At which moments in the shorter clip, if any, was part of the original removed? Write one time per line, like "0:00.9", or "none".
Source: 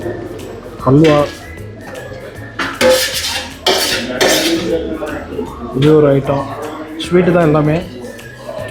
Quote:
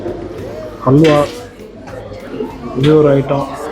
0:02.3